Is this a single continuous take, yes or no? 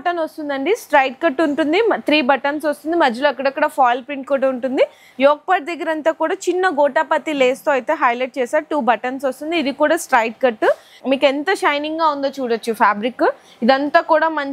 no